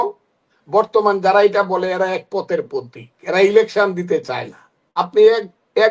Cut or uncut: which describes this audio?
cut